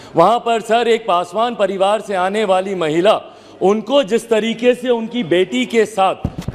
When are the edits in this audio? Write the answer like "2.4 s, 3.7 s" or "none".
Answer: none